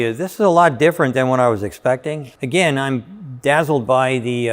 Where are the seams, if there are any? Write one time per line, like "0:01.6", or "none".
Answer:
0:02.3

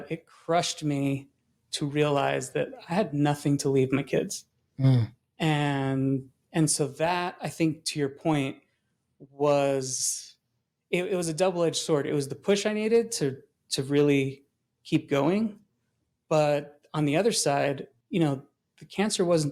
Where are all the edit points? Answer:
none

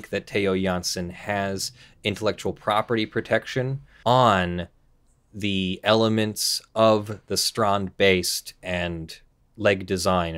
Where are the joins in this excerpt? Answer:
0:03.8

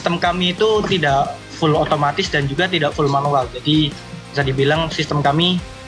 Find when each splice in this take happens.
none

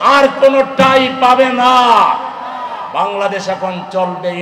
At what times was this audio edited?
none

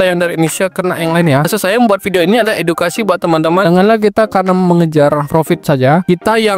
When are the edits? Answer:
0:01.5
0:03.6

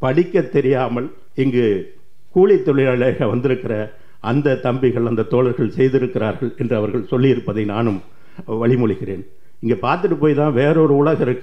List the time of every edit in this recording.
0:01.2

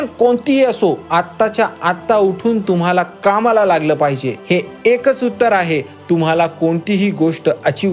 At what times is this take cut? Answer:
0:01.0
0:04.3

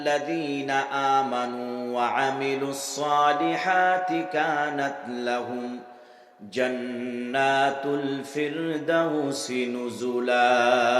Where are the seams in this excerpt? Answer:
none

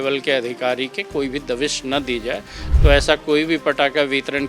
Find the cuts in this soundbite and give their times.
0:02.6

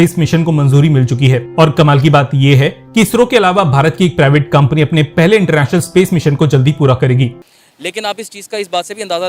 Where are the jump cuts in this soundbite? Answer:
0:07.4

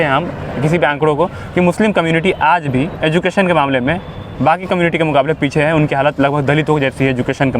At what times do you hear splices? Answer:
0:02.9

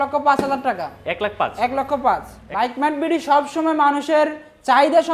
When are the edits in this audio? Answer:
0:02.3

